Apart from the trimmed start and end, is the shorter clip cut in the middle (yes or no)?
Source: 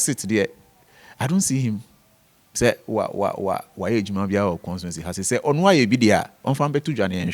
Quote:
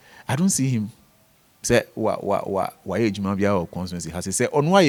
no